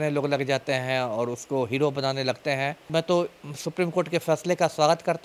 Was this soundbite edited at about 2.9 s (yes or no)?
yes